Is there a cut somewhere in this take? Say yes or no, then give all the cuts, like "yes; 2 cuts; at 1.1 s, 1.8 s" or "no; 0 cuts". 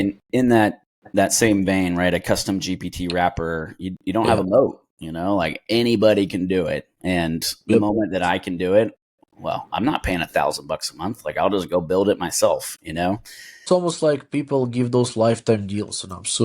yes; 1 cut; at 13.7 s